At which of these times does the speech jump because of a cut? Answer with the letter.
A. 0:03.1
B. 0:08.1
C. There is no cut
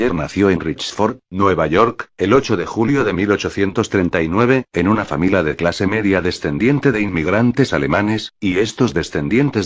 C